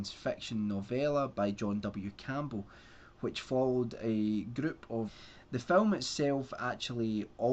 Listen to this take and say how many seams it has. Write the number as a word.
zero